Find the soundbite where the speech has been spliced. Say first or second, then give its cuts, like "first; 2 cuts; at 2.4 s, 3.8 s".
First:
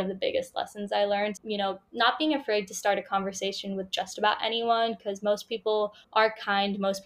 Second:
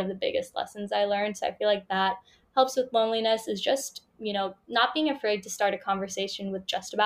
first; 2 cuts; at 1.4 s, 6.0 s